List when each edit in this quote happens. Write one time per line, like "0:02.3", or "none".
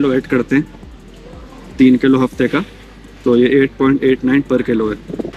none